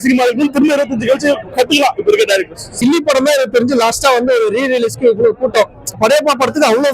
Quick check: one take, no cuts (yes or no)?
no